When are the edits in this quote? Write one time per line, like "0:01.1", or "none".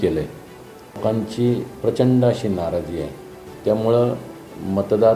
0:01.0